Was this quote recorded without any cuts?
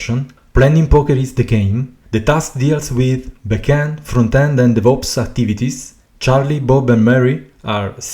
no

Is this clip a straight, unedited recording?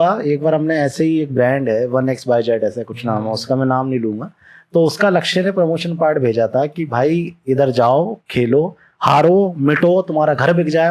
yes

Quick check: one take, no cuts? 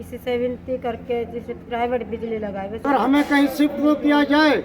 no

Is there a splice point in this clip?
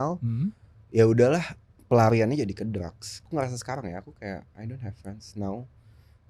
yes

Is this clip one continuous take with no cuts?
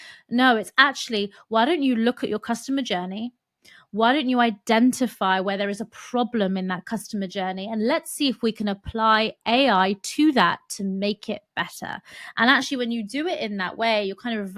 yes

